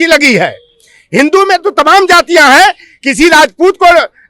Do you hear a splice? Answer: no; 0 cuts

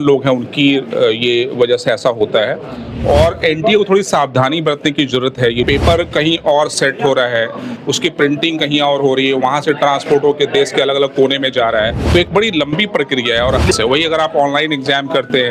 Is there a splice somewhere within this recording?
yes; 3 cuts; at 5.7 s, 12.0 s, 13.7 s

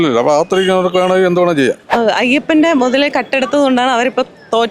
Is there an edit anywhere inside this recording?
yes; 1 cut; at 1.9 s

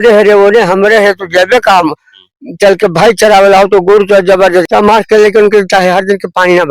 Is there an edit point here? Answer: yes; 1 cut; at 4.7 s

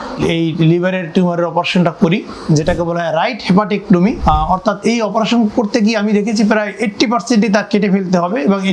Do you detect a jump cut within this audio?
yes; 1 cut; at 4.2 s

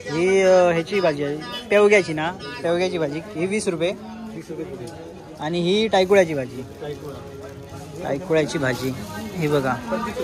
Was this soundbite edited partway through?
no; 0 cuts

